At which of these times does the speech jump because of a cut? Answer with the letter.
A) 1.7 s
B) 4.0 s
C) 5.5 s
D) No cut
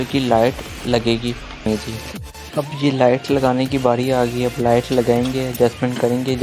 A